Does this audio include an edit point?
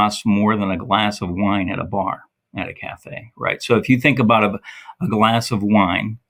no; 0 cuts

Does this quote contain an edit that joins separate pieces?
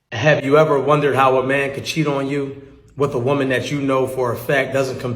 no; 0 cuts

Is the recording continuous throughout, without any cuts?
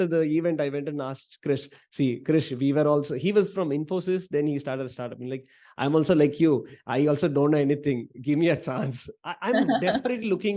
yes; 0 cuts

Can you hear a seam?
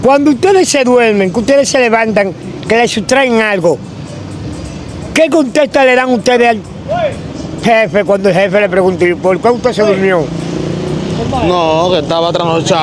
no; 0 cuts

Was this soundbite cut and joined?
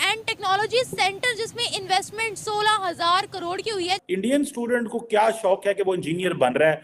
yes; 1 cut; at 4.0 s

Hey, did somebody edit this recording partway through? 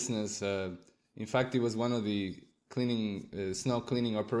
no; 0 cuts

